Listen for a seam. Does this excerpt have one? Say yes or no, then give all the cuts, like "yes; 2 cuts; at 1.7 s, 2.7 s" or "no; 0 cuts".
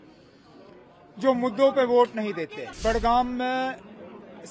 yes; 1 cut; at 2.6 s